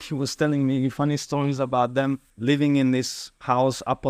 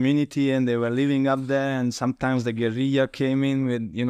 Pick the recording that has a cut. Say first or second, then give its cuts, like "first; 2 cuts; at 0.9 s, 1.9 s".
first; 1 cut; at 2.3 s